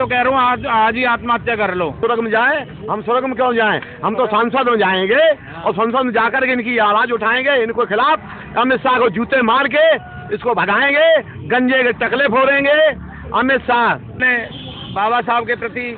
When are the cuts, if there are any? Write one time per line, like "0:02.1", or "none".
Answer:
0:02.0
0:14.2